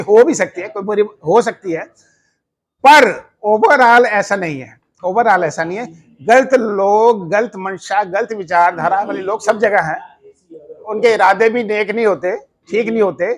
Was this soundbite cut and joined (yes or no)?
no